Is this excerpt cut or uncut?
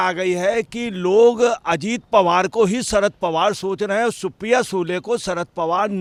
uncut